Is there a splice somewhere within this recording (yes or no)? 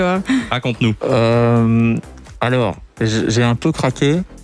no